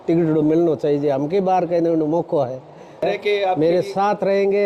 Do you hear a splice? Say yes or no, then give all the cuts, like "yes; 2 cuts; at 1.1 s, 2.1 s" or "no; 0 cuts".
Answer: yes; 1 cut; at 3.0 s